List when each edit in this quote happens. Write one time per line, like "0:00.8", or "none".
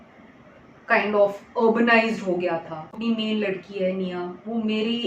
0:03.0